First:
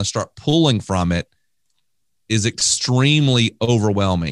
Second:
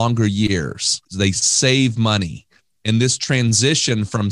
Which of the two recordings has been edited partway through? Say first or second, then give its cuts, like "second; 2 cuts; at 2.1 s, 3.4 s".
second; 1 cut; at 1.0 s